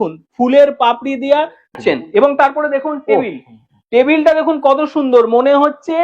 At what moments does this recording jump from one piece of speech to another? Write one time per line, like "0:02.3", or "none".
0:01.8